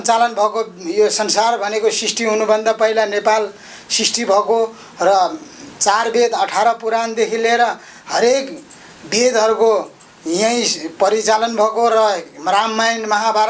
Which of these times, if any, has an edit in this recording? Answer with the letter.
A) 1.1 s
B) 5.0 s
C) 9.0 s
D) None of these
D